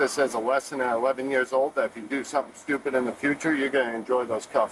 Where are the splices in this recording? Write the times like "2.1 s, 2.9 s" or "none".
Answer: none